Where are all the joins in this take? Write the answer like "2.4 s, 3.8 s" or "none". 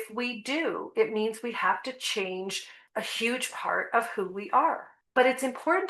2.7 s, 4.9 s